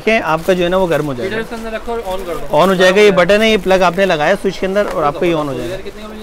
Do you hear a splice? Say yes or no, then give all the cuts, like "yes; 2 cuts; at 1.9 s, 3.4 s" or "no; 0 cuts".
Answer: no; 0 cuts